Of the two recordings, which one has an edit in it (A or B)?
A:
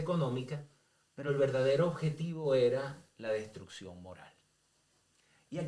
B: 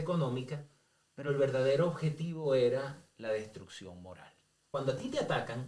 B